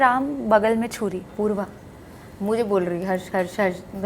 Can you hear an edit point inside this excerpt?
yes; 1 cut; at 1.3 s

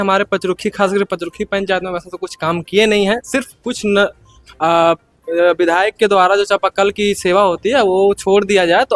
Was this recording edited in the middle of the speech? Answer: no; 0 cuts

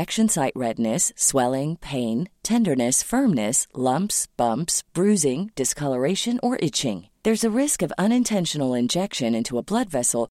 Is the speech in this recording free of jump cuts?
yes; 0 cuts

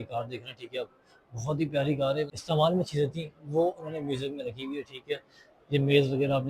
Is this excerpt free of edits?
no; 1 cut; at 2.4 s

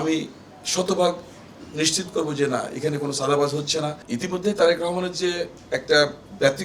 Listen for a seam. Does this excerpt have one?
yes; 1 cut; at 4.0 s

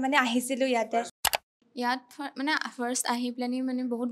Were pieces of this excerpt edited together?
yes; 1 cut; at 1.4 s

